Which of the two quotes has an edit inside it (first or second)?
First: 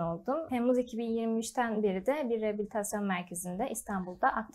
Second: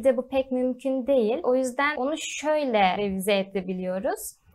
second